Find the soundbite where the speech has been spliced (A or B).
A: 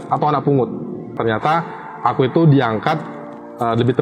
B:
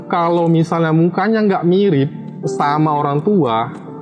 A